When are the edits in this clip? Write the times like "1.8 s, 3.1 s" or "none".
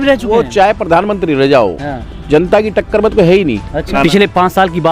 3.7 s